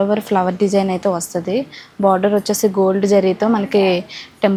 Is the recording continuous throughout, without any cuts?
yes; 0 cuts

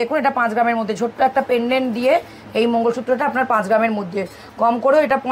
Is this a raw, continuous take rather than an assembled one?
yes; 0 cuts

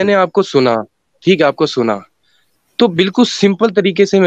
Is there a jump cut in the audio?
no; 0 cuts

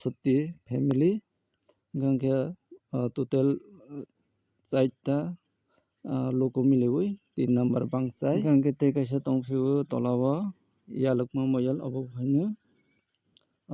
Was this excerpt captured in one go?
no; 1 cut; at 8.4 s

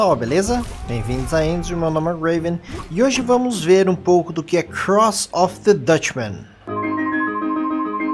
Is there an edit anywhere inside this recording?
no; 0 cuts

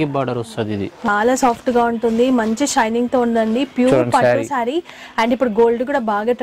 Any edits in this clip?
yes; 1 cut; at 1.1 s

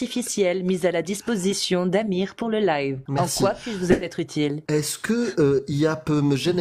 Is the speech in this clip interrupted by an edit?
yes; 2 cuts; at 3.0 s, 4.6 s

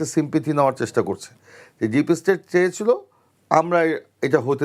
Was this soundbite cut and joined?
no; 0 cuts

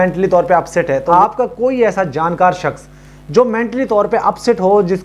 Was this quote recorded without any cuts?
no; 1 cut; at 1.1 s

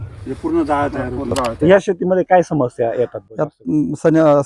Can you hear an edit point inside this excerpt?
yes; 1 cut; at 1.5 s

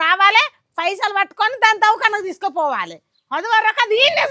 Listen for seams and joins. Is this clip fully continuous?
yes; 0 cuts

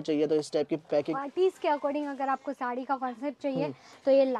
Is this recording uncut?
no; 1 cut; at 1.1 s

